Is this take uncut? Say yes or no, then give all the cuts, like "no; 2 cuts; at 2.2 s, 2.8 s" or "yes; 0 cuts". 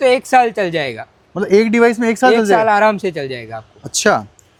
yes; 0 cuts